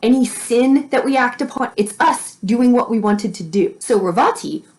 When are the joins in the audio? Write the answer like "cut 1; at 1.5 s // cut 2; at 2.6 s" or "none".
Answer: cut 1; at 1.5 s // cut 2; at 3.8 s

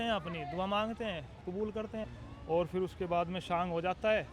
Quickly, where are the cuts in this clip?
cut 1; at 2.0 s

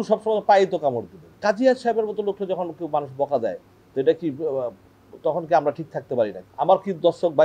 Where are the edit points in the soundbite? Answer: cut 1; at 1.3 s // cut 2; at 6.4 s

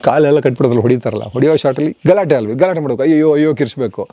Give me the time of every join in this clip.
none

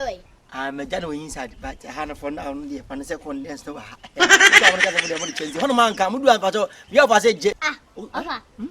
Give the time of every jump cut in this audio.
cut 1; at 7.6 s

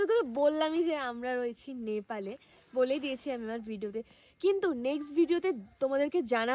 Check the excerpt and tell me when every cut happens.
none

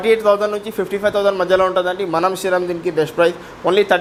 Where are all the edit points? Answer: none

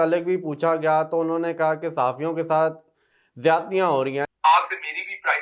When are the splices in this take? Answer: cut 1; at 4.3 s

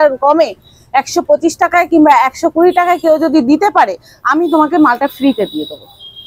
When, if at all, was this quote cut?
none

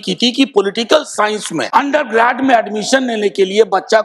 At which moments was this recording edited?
cut 1; at 1.7 s

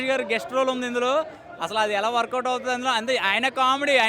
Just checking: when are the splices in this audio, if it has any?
none

